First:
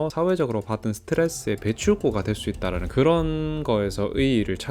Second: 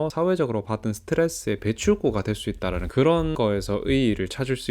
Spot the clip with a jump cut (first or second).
second